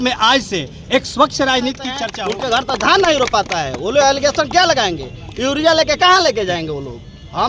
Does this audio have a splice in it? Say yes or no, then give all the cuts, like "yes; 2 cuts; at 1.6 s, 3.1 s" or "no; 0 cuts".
yes; 1 cut; at 2.0 s